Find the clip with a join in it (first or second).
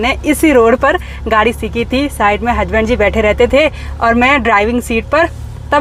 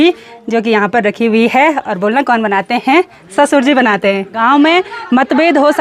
second